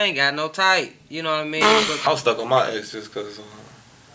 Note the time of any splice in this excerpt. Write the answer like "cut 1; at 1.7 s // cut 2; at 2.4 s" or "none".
cut 1; at 1.9 s